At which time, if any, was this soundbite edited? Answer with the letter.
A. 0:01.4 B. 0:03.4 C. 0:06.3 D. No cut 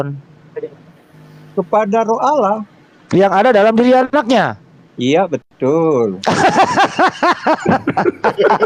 D